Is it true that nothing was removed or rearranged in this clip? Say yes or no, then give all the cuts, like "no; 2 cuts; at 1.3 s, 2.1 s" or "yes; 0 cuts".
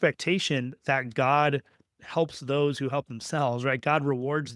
yes; 0 cuts